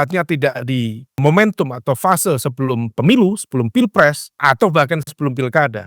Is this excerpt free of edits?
no; 2 cuts; at 1.2 s, 4.4 s

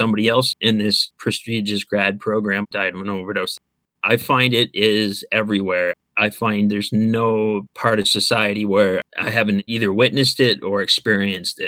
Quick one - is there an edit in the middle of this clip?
no; 0 cuts

